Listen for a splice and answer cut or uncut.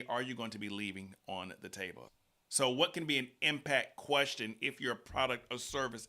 cut